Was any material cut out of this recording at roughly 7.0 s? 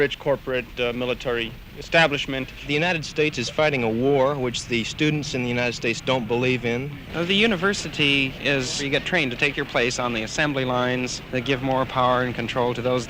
yes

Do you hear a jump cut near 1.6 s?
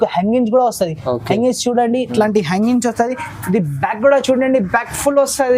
no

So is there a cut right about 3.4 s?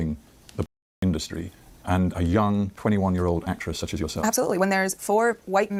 no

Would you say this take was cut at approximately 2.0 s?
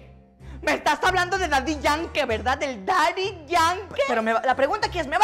no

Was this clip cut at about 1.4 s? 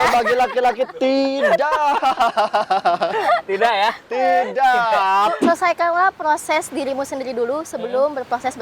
no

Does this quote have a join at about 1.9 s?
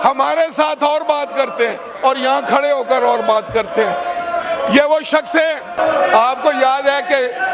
no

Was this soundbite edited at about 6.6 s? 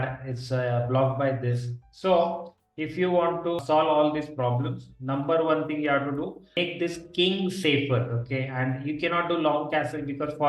yes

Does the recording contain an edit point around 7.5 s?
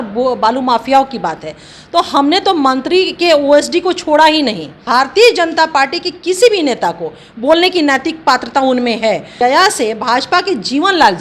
no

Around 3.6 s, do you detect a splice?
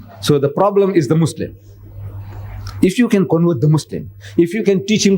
yes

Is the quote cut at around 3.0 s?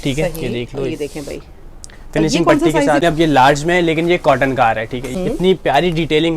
yes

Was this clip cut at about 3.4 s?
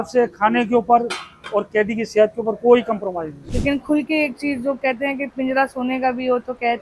yes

